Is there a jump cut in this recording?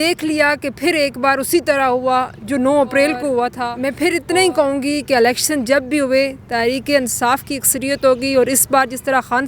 yes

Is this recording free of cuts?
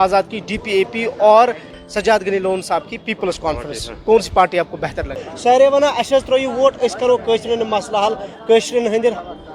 no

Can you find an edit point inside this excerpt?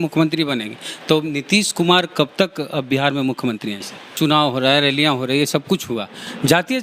yes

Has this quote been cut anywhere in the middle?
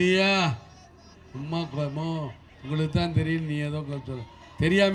no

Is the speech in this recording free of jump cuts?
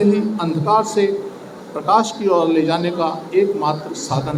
yes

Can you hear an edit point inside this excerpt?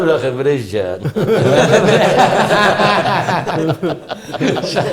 no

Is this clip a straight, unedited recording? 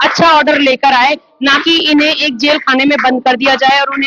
yes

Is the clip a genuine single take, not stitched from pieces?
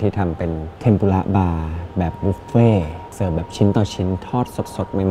yes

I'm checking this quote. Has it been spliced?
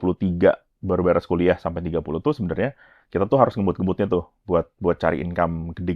no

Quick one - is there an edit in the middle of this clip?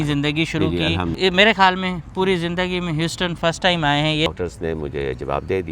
yes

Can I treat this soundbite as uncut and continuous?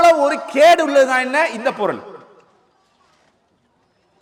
yes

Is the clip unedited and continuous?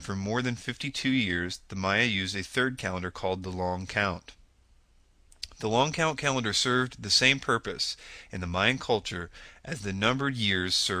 no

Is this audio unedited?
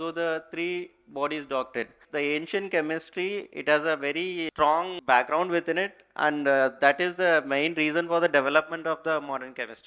no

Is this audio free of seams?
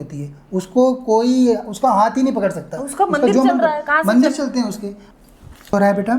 no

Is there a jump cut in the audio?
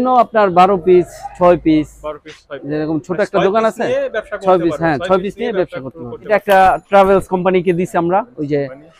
yes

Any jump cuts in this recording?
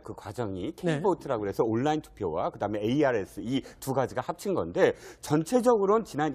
yes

